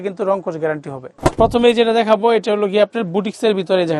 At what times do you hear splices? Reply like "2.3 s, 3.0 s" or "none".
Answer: none